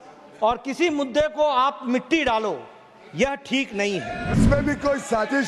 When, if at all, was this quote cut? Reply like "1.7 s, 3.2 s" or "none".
4.3 s